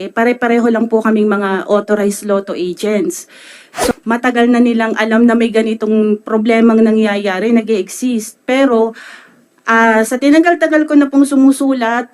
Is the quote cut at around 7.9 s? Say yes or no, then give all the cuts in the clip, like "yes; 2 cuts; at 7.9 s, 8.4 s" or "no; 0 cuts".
no; 1 cut; at 3.9 s